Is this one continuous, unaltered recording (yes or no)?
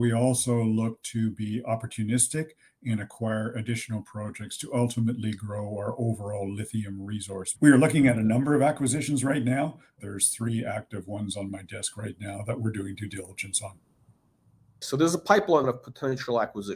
no